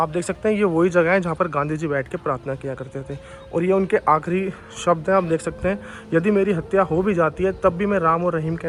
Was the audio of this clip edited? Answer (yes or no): no